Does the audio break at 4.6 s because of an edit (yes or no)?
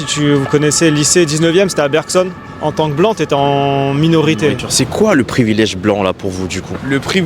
yes